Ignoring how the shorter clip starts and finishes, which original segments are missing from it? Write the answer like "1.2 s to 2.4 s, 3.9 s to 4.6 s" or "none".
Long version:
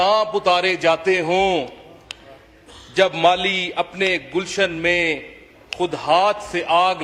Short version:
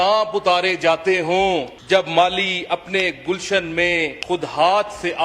1.7 s to 2.8 s, 5.2 s to 5.7 s